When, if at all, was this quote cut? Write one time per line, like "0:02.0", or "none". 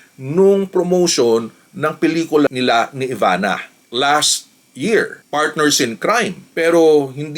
none